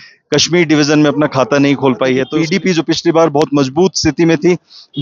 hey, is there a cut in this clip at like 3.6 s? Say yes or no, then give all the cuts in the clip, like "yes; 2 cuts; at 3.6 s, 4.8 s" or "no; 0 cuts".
no; 1 cut; at 2.3 s